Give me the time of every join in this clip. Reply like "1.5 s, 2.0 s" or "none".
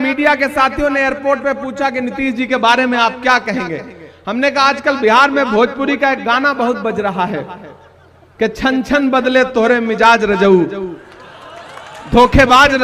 none